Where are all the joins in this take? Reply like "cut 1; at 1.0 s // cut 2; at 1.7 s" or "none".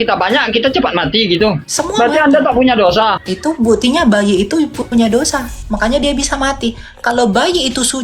cut 1; at 1.7 s // cut 2; at 3.3 s